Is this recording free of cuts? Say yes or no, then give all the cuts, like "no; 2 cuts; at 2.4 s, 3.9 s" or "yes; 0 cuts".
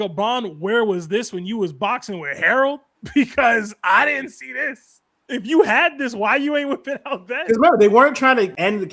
yes; 0 cuts